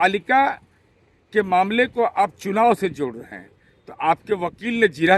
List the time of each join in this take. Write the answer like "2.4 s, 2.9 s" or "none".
none